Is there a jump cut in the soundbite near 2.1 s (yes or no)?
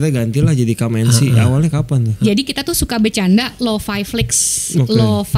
yes